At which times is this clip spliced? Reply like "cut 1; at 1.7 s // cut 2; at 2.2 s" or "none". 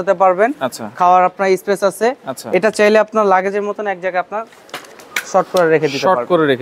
none